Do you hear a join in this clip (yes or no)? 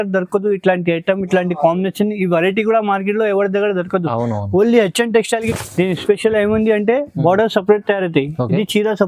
yes